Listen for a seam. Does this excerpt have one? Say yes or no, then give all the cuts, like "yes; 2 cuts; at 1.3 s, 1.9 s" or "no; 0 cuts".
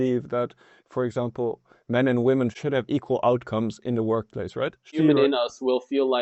yes; 2 cuts; at 2.6 s, 4.9 s